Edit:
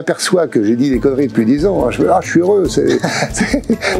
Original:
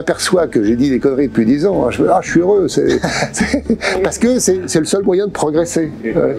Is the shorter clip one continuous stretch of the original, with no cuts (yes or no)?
yes